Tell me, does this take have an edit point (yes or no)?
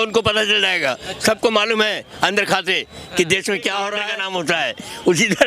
yes